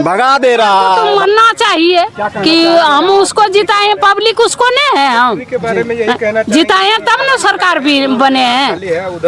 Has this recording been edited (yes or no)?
yes